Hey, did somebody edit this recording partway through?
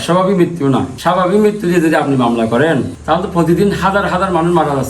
yes; 2 cuts; at 0.9 s, 3.0 s

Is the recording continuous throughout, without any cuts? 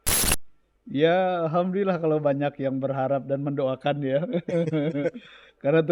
yes; 0 cuts

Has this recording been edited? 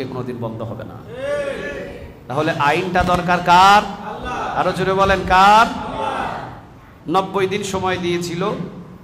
no; 0 cuts

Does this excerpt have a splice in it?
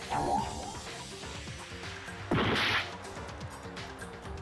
yes; 3 cuts; at 0.8 s, 2.3 s, 3.5 s

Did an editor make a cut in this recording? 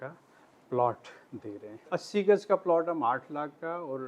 yes; 1 cut; at 1.8 s

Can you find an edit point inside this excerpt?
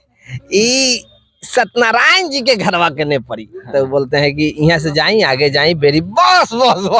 no; 0 cuts

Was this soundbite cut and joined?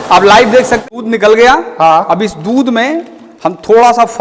yes; 1 cut; at 0.9 s

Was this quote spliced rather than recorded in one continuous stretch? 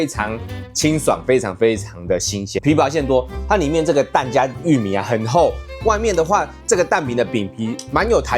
yes; 1 cut; at 2.5 s

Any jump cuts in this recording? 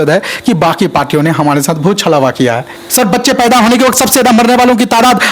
yes; 1 cut; at 2.7 s

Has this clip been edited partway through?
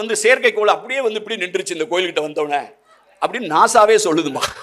no; 0 cuts

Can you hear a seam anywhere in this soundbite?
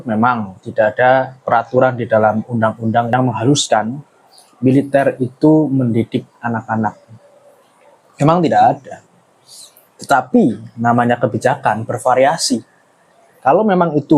no; 0 cuts

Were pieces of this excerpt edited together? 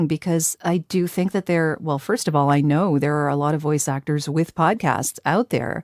no; 0 cuts

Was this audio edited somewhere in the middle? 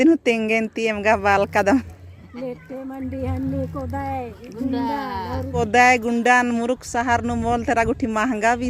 yes; 1 cut; at 5.6 s

